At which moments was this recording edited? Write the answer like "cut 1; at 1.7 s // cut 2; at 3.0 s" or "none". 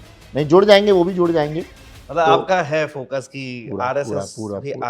none

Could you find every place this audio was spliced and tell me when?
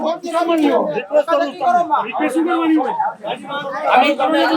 none

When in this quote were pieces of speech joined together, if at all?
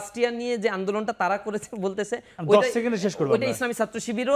none

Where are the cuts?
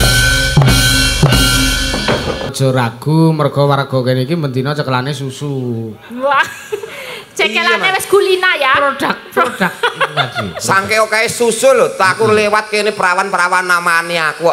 cut 1; at 2.5 s

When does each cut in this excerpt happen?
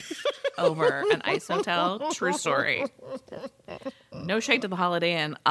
none

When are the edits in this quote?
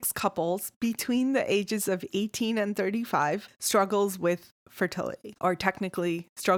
cut 1; at 3.5 s // cut 2; at 5.3 s

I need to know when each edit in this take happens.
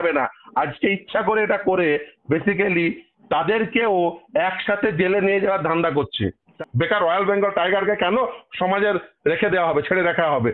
cut 1; at 6.2 s

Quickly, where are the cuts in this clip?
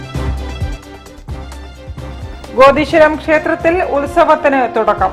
none

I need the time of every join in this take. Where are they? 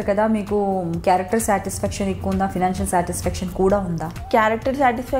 cut 1; at 4.1 s

